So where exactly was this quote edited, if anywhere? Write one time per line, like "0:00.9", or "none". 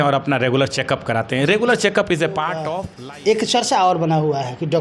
0:02.8